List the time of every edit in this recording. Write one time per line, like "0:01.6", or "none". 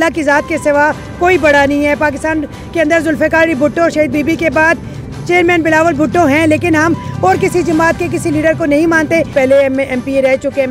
0:09.3